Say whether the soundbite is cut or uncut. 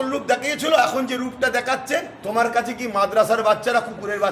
cut